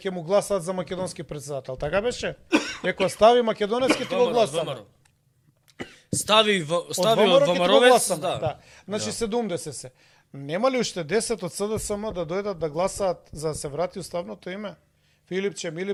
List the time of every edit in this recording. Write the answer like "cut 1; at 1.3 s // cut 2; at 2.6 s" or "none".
none